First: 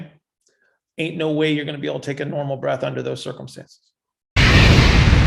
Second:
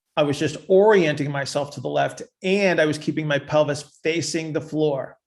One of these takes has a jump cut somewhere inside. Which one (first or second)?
first